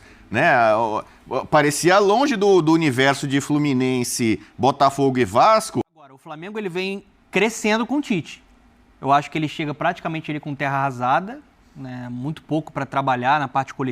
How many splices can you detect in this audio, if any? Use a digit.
1